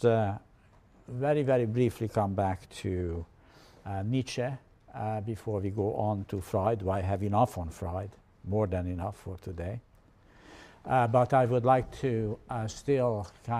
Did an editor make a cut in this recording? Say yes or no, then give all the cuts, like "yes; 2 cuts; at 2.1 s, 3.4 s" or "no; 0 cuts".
yes; 1 cut; at 3.4 s